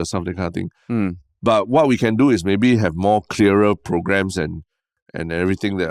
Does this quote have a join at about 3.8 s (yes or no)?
no